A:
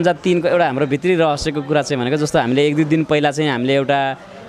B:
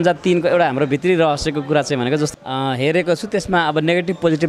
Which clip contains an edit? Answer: B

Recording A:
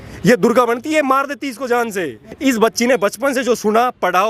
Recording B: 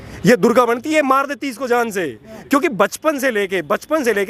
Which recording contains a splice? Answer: A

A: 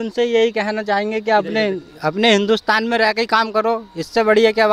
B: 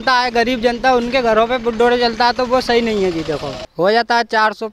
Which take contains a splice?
B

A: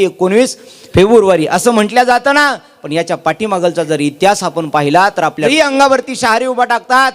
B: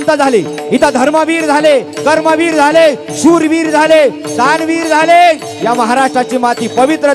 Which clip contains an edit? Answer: A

